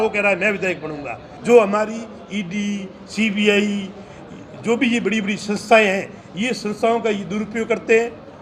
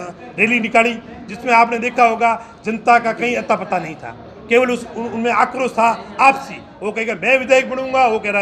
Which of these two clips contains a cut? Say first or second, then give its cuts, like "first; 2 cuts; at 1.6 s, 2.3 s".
first; 1 cut; at 1.3 s